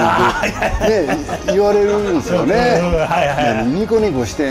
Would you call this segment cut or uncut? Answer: uncut